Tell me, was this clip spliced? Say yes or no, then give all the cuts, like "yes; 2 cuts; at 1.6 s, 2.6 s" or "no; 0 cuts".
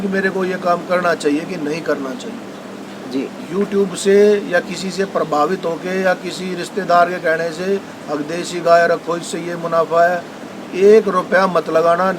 no; 0 cuts